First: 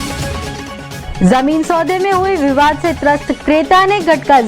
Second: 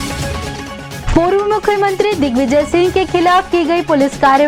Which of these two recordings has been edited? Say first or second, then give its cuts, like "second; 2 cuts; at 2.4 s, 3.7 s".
first; 1 cut; at 0.9 s